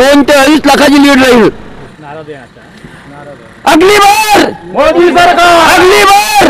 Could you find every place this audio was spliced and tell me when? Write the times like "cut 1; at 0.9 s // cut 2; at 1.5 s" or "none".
cut 1; at 1.9 s